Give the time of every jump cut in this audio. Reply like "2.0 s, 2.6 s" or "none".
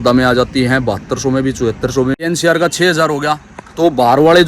2.1 s